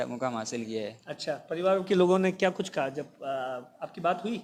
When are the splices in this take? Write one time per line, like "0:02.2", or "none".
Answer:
none